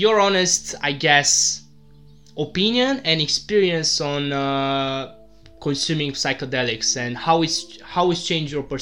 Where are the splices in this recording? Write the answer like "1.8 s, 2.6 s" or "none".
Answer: none